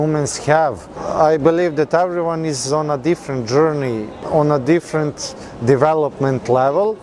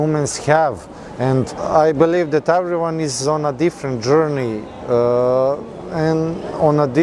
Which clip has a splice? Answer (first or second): first